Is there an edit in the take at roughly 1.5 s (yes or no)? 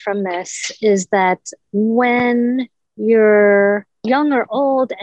yes